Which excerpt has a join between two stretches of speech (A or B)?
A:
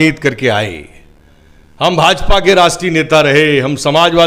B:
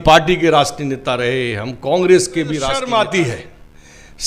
B